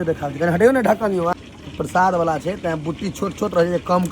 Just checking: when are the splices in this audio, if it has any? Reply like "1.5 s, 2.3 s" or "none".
1.3 s